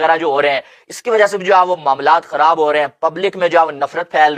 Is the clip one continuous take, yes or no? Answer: yes